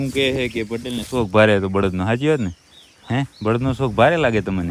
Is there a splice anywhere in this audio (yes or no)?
no